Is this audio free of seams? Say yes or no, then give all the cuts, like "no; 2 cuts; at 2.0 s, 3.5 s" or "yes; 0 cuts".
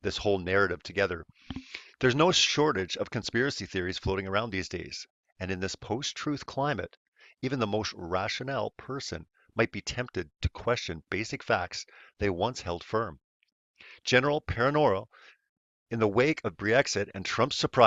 yes; 0 cuts